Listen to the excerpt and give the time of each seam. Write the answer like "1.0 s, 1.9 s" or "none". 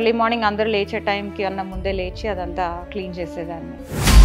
none